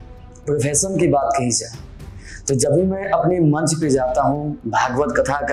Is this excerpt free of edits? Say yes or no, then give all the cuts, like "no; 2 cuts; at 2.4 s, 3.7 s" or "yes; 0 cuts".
yes; 0 cuts